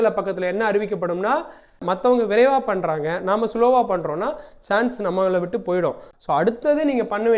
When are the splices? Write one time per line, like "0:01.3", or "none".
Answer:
0:01.8
0:06.1